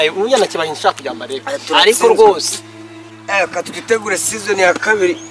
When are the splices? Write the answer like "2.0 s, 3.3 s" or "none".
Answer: none

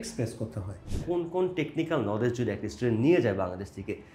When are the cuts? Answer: 1.0 s

